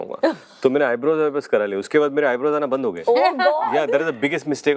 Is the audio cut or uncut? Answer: uncut